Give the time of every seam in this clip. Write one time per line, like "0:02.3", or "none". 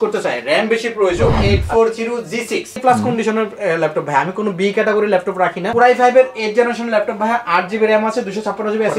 0:01.3
0:02.8
0:05.7